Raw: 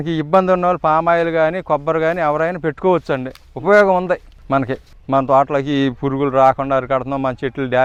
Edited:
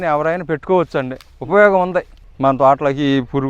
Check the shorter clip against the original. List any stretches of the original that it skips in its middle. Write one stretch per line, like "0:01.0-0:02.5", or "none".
0:04.3-0:04.9